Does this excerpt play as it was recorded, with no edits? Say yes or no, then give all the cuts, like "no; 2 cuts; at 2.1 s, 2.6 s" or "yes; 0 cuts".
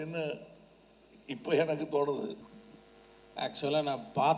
no; 1 cut; at 2.5 s